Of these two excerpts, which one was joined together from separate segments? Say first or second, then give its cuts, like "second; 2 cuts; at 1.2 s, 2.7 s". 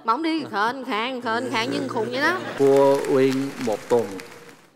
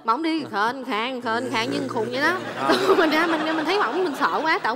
first; 1 cut; at 2.5 s